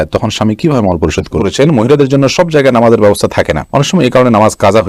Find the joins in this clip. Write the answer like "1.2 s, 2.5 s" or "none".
1.4 s